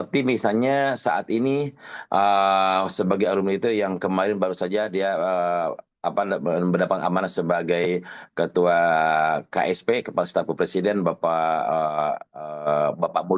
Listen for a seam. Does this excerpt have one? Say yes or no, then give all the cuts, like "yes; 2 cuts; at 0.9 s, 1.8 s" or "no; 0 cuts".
no; 0 cuts